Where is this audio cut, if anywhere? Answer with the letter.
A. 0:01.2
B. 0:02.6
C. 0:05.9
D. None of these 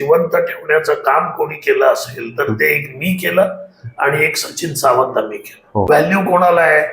C